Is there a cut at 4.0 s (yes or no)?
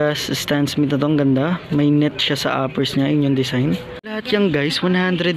yes